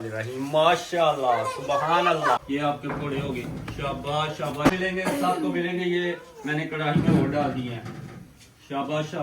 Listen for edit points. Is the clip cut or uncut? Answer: cut